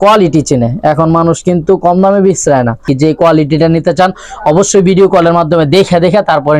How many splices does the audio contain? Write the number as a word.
one